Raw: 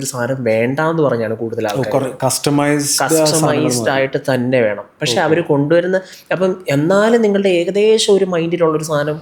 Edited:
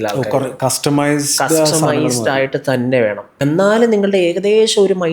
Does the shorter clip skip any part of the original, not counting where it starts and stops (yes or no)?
yes